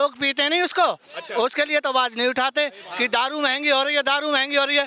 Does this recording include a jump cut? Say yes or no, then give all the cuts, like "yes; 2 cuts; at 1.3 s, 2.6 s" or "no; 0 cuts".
no; 0 cuts